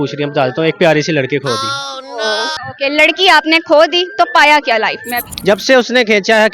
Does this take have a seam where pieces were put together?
yes; 2 cuts; at 2.5 s, 5.3 s

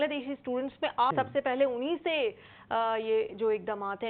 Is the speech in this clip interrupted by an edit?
yes; 1 cut; at 1.1 s

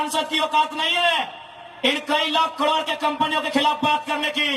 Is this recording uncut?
yes; 0 cuts

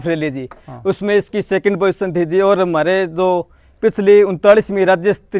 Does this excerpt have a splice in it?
no; 0 cuts

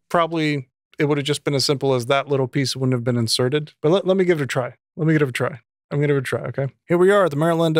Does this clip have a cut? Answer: yes; 2 cuts; at 3.7 s, 6.8 s

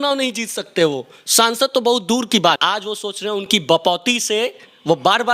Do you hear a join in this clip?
yes; 1 cut; at 2.6 s

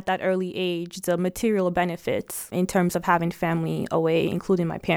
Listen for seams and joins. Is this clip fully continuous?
yes; 0 cuts

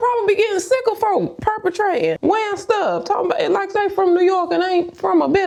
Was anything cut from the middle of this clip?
no; 0 cuts

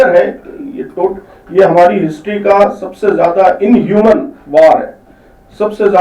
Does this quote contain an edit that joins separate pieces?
no; 0 cuts

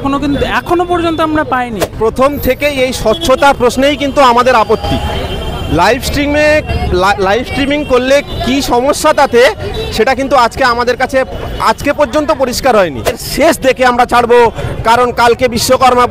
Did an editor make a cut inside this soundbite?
yes; 2 cuts; at 1.8 s, 13.2 s

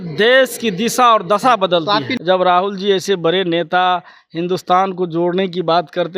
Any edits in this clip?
yes; 1 cut; at 2.1 s

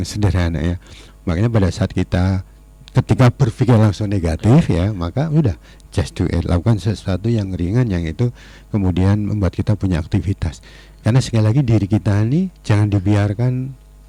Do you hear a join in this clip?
no; 0 cuts

